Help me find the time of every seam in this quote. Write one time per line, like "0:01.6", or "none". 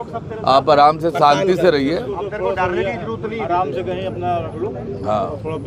none